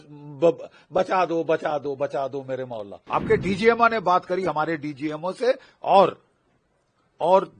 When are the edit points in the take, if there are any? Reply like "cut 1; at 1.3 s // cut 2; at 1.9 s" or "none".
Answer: cut 1; at 2.9 s